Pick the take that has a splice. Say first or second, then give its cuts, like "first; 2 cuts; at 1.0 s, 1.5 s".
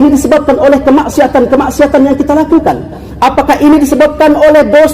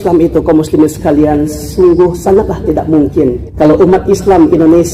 second; 1 cut; at 3.4 s